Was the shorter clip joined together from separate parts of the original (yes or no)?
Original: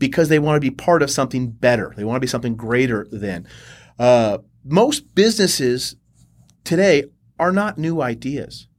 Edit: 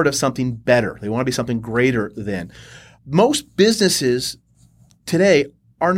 yes